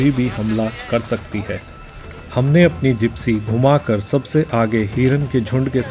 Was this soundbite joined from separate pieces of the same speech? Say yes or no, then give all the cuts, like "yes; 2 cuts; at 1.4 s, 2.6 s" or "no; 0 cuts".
no; 0 cuts